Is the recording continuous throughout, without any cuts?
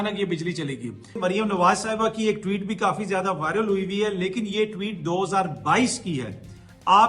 no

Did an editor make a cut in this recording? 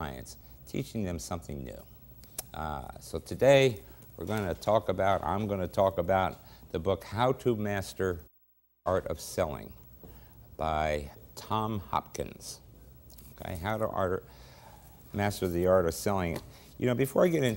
yes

